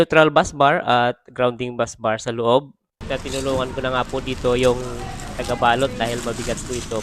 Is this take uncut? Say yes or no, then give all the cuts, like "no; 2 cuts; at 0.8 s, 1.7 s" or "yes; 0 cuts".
no; 1 cut; at 3.0 s